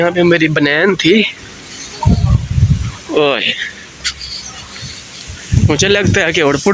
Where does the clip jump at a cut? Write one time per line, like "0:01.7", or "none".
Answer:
none